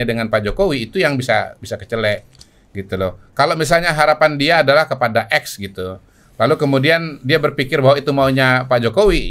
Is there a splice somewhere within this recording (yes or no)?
no